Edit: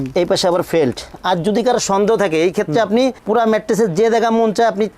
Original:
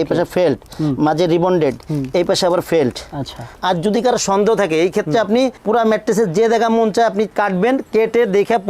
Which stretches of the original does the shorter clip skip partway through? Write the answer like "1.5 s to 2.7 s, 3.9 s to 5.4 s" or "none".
3.1 s to 3.5 s